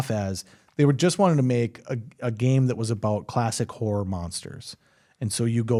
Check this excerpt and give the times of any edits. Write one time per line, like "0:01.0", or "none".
none